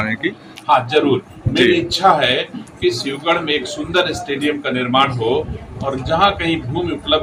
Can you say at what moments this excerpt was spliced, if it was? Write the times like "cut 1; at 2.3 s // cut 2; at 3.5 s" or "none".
none

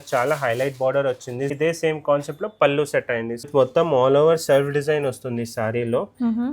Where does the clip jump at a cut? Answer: cut 1; at 1.5 s // cut 2; at 3.5 s

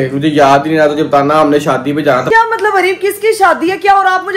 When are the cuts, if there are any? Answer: cut 1; at 2.2 s

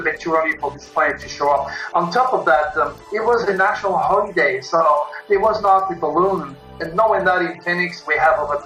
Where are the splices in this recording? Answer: none

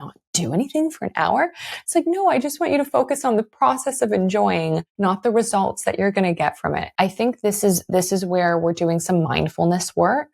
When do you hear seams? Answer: cut 1; at 4.9 s // cut 2; at 6.9 s

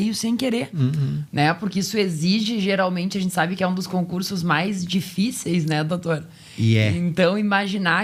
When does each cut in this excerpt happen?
none

